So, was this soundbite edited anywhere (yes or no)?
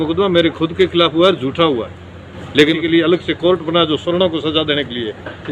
yes